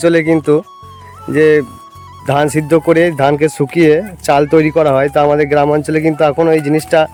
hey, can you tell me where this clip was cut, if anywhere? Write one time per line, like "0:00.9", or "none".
none

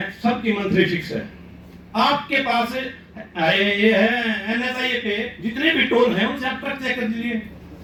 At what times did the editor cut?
none

